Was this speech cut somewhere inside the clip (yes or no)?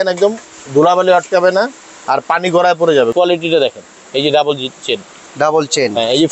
yes